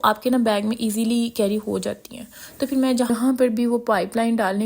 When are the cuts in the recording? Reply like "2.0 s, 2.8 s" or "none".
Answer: 3.1 s